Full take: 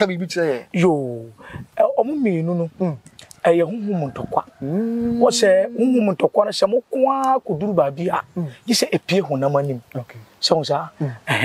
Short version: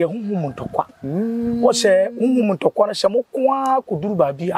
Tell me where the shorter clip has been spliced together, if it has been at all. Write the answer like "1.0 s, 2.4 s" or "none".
none